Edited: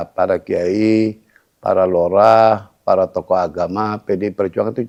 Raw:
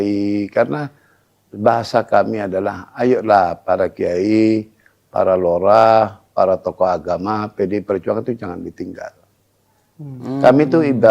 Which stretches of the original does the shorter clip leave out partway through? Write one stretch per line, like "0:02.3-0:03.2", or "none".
none